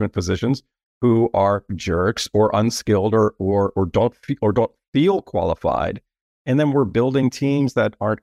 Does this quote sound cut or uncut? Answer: uncut